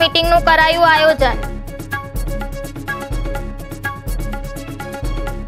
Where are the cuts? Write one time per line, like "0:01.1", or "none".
none